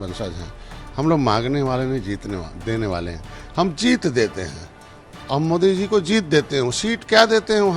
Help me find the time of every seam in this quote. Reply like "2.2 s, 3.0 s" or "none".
none